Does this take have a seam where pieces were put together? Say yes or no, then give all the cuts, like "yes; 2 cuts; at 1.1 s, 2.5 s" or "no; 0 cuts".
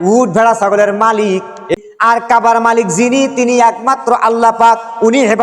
yes; 1 cut; at 1.7 s